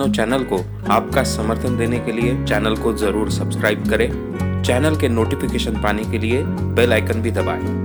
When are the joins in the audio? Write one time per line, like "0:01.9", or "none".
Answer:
none